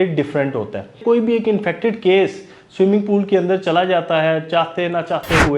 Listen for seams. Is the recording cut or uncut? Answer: cut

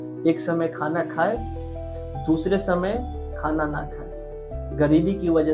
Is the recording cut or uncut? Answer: uncut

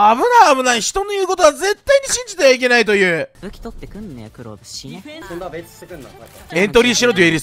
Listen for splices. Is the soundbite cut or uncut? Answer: cut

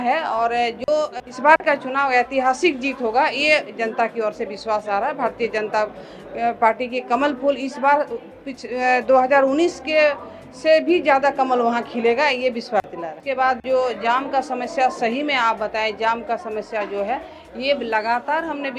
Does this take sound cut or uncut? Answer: cut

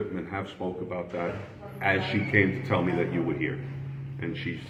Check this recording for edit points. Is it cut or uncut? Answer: uncut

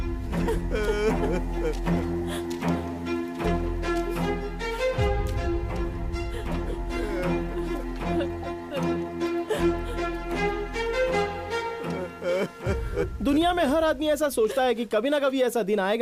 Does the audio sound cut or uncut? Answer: uncut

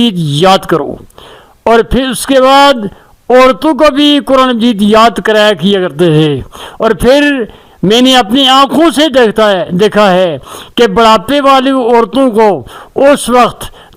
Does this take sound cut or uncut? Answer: uncut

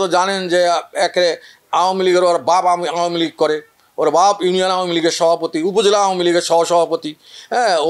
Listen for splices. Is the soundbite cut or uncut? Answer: uncut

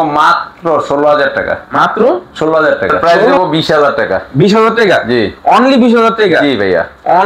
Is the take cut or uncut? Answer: cut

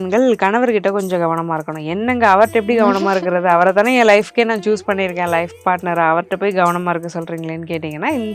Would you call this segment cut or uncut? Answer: uncut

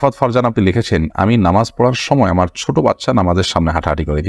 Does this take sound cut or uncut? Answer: uncut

